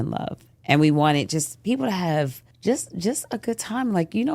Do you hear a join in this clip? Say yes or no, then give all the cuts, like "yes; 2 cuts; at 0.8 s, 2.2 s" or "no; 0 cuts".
yes; 1 cut; at 2.4 s